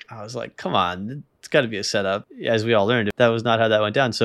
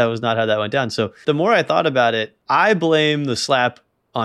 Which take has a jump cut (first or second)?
first